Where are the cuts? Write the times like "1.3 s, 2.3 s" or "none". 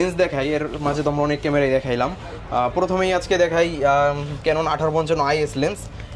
none